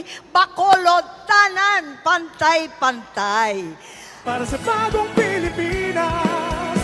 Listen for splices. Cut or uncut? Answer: cut